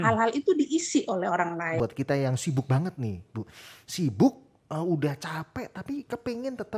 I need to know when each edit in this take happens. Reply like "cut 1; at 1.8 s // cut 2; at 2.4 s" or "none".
cut 1; at 1.8 s